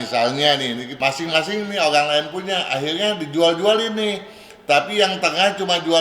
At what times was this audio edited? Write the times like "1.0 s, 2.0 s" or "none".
1.0 s

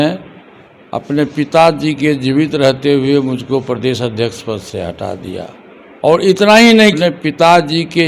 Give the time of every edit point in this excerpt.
7.0 s

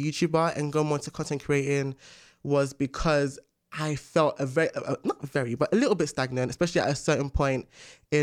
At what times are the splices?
none

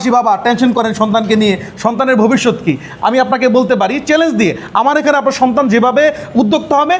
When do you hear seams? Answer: none

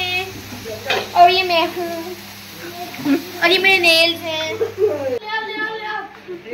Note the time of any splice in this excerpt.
5.2 s

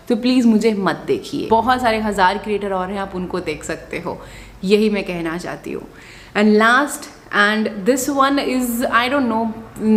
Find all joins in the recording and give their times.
none

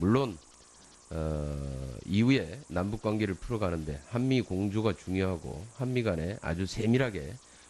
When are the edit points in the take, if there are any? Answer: 4.0 s

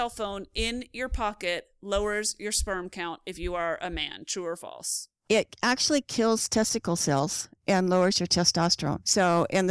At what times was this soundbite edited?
none

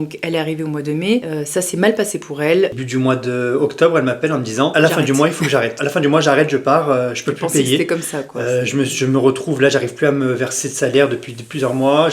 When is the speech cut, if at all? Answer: 1.3 s, 2.8 s, 4.7 s, 5.8 s

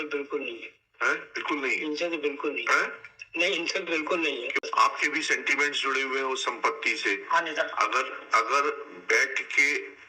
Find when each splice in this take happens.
4.5 s

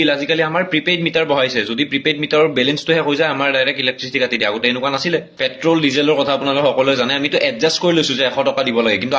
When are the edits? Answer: 5.3 s

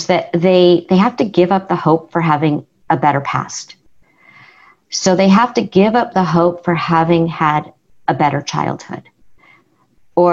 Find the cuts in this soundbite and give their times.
none

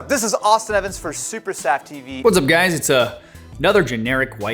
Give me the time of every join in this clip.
2.0 s

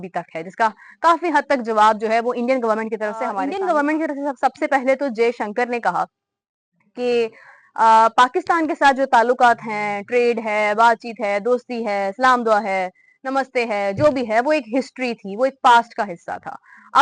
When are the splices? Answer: 3.4 s

